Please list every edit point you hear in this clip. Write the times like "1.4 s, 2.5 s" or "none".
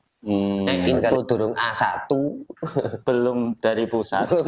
1.1 s